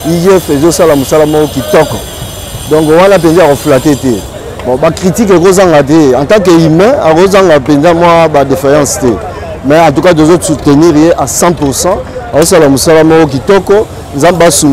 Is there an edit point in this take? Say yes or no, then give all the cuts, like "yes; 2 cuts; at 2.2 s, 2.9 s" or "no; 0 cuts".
no; 0 cuts